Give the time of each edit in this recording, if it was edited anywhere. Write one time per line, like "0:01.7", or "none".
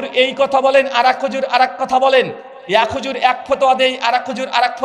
none